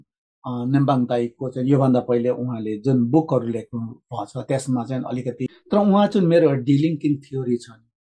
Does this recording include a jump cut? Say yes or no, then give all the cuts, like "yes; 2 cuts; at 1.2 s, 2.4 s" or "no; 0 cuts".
yes; 1 cut; at 5.5 s